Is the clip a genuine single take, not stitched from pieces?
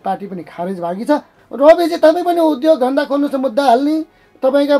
no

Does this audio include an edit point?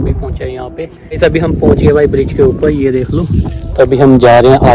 yes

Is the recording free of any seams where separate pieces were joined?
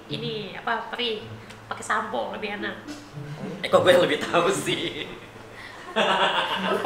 yes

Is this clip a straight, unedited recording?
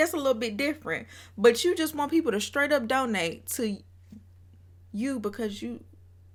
yes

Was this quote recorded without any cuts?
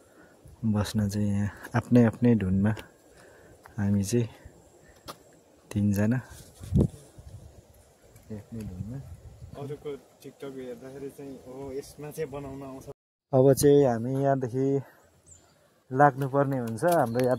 yes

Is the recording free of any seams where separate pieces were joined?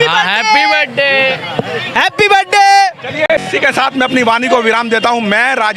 yes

